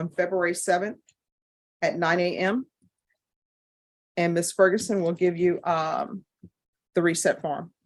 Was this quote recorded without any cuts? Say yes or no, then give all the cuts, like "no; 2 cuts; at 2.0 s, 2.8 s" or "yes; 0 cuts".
yes; 0 cuts